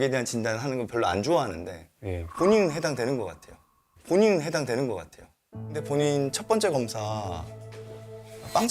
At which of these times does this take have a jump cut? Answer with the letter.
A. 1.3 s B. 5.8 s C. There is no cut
B